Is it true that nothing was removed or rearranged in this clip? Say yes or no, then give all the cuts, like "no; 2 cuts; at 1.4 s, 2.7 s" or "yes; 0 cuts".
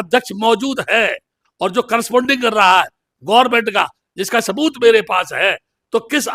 yes; 0 cuts